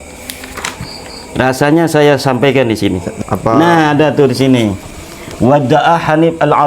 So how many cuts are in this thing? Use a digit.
1